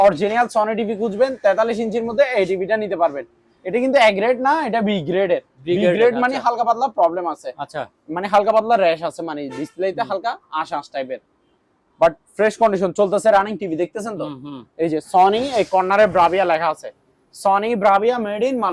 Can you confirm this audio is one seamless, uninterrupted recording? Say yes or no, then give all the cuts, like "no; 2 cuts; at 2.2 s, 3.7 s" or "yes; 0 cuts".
yes; 0 cuts